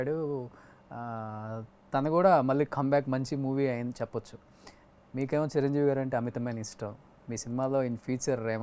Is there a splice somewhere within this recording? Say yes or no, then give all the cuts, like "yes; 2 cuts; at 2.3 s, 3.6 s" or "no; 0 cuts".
no; 0 cuts